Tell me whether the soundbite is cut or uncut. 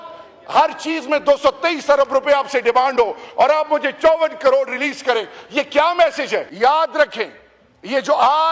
cut